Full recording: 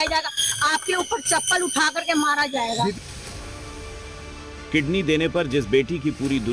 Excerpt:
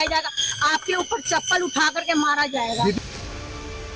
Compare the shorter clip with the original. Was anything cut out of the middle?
yes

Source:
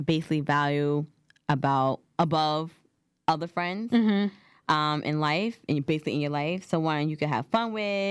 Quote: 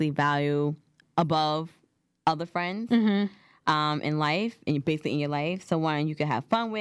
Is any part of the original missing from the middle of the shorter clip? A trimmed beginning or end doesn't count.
yes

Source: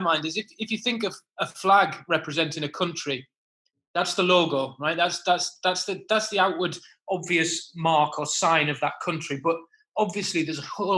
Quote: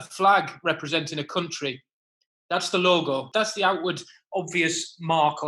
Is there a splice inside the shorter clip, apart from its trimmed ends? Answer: yes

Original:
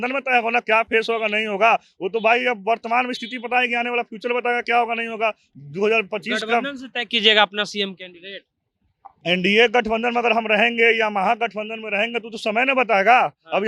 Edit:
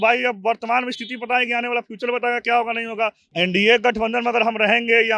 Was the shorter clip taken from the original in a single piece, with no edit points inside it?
no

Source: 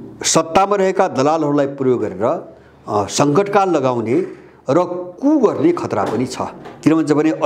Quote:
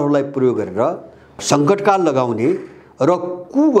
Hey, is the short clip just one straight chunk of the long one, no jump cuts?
no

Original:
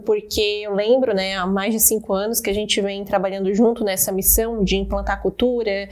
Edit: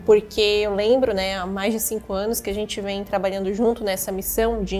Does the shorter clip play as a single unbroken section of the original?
yes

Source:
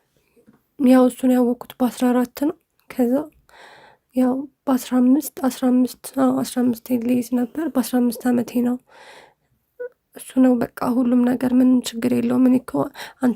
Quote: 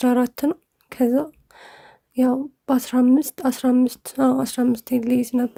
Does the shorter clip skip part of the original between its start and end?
no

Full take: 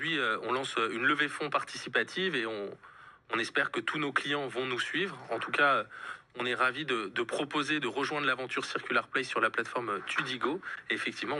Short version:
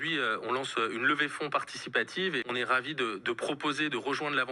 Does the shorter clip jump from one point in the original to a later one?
yes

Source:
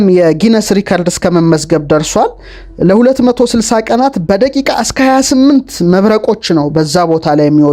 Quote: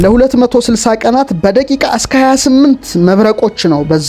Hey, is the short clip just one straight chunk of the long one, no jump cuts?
yes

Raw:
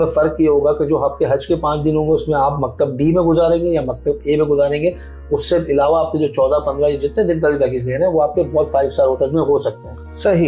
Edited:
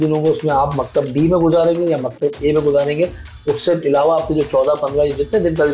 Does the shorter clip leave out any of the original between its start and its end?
no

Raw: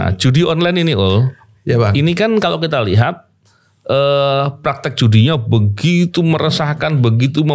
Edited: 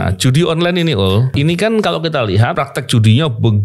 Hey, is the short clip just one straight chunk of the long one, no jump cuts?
no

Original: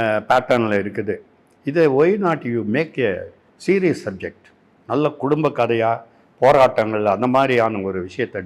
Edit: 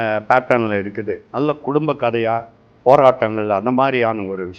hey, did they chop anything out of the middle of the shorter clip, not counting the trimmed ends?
yes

